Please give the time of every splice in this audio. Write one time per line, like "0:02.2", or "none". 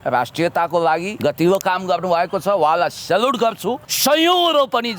0:01.1
0:03.9